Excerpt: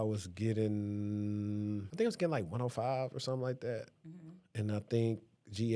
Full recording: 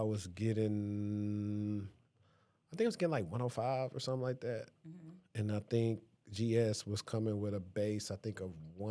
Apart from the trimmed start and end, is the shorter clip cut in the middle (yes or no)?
yes